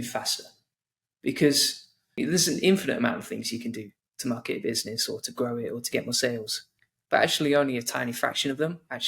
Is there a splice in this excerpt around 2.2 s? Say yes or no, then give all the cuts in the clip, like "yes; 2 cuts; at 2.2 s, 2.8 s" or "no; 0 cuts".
yes; 1 cut; at 2.2 s